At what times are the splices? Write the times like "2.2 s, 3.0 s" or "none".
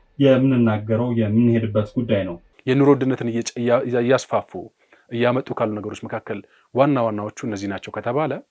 2.5 s